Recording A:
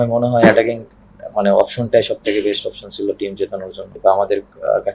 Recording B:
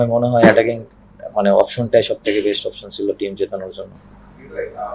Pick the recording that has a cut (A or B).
A